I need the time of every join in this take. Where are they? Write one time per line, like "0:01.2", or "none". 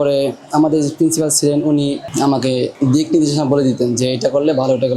none